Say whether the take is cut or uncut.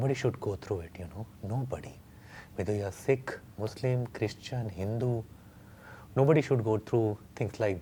uncut